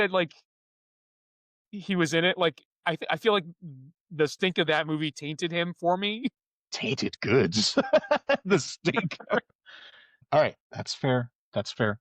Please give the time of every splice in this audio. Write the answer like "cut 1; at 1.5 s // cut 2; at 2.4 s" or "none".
cut 1; at 10.2 s